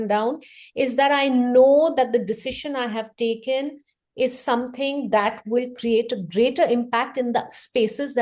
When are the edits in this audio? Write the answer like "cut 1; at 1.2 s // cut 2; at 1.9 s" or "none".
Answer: none